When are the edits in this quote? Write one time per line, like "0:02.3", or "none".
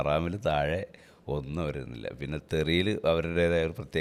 none